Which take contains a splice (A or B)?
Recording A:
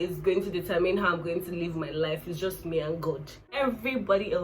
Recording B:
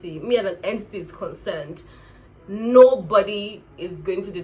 A